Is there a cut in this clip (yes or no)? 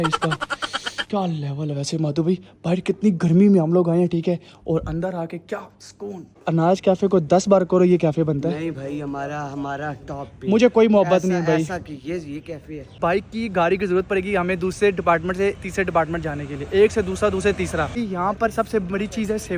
yes